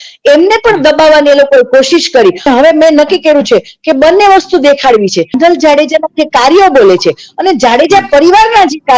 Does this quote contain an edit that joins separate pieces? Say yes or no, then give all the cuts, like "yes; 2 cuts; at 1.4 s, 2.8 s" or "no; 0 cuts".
yes; 2 cuts; at 2.5 s, 5.4 s